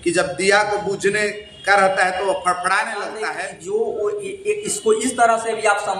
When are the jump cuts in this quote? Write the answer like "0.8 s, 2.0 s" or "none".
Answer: 3.3 s